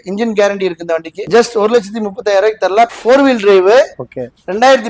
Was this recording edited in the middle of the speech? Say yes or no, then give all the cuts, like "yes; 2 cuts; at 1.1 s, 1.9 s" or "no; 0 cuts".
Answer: yes; 2 cuts; at 1.3 s, 2.9 s